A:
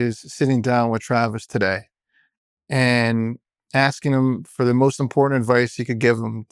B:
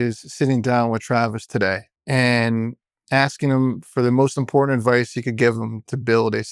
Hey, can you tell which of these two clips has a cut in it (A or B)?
B